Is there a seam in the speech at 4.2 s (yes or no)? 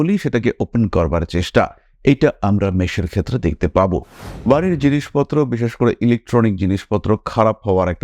yes